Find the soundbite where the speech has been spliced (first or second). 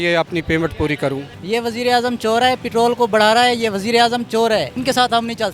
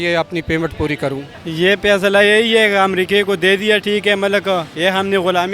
first